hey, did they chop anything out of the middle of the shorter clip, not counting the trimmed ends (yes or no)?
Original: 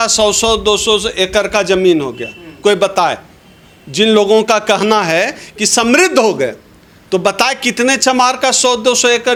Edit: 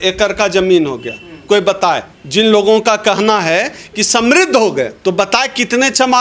yes